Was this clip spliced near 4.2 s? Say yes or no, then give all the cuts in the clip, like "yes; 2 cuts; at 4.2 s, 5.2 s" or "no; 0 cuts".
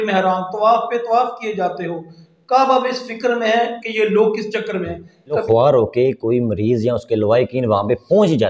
no; 1 cut; at 5.4 s